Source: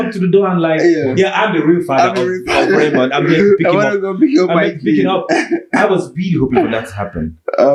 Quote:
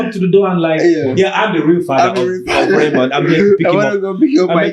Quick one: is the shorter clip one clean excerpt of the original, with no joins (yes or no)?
yes